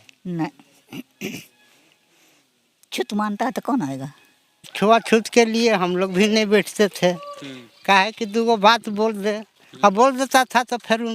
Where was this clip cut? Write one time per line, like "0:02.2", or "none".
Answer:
0:04.7